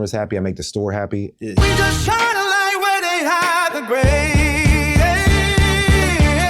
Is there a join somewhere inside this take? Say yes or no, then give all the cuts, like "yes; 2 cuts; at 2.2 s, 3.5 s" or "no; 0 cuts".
yes; 1 cut; at 1.5 s